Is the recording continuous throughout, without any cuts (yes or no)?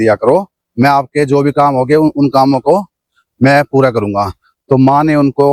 yes